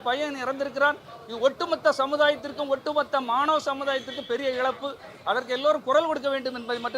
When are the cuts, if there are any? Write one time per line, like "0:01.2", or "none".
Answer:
none